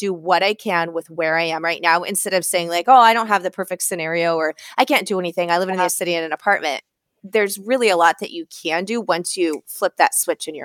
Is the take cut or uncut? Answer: uncut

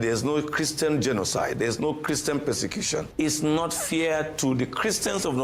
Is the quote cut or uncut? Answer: uncut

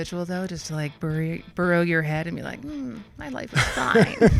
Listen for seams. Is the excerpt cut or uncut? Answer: uncut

